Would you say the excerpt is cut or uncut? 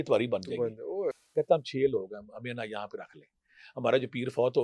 cut